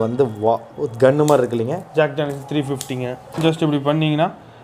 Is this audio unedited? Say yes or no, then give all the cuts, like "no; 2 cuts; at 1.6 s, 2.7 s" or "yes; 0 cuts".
no; 1 cut; at 3.4 s